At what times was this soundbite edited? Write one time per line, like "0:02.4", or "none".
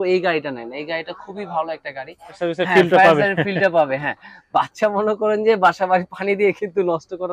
0:02.4